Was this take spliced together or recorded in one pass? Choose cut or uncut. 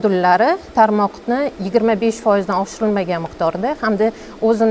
uncut